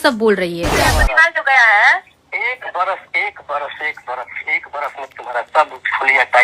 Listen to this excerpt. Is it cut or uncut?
cut